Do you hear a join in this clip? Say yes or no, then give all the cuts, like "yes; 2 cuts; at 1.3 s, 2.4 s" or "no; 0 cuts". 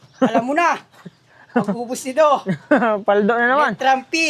no; 0 cuts